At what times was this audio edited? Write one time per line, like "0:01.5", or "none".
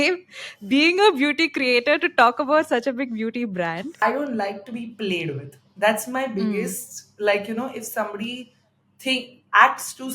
0:04.0